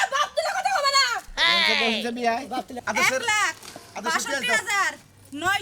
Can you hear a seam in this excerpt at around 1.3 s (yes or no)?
no